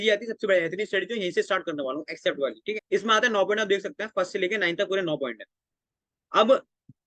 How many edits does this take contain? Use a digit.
1